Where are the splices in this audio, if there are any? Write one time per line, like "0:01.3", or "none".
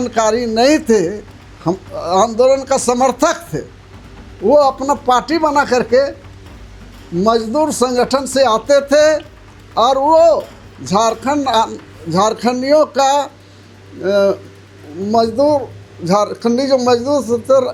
none